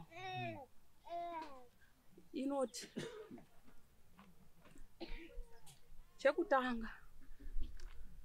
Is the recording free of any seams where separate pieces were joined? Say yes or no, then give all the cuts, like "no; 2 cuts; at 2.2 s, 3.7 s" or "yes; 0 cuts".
yes; 0 cuts